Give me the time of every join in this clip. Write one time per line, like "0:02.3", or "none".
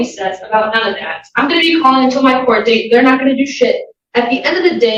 none